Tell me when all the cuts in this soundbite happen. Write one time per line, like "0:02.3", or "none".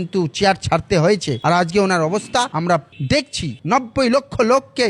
0:03.6